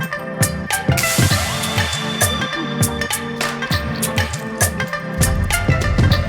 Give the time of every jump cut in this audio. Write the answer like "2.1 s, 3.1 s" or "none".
none